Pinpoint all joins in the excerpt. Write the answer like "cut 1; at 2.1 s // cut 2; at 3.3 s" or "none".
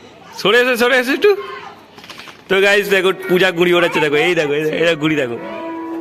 none